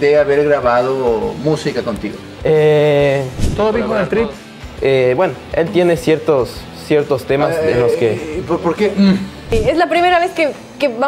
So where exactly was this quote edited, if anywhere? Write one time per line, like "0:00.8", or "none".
0:03.4